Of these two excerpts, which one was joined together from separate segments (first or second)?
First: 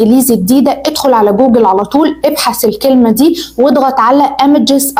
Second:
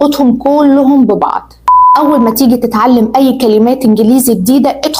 second